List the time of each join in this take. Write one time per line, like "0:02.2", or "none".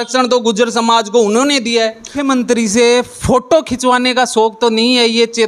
0:02.2